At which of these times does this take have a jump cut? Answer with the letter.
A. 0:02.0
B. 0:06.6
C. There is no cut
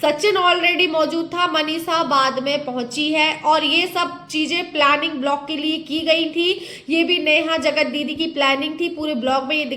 C